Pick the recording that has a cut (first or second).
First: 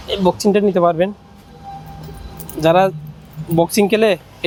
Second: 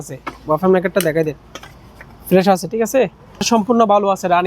second